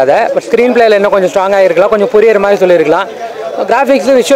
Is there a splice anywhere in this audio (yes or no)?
no